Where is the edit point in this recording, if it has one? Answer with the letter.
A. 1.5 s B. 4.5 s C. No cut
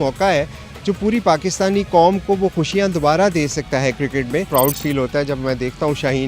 B